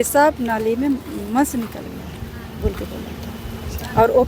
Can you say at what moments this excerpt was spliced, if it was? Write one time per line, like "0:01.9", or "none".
none